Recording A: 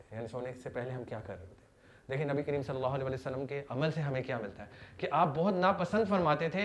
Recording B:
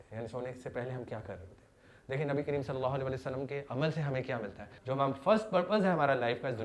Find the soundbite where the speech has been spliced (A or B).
B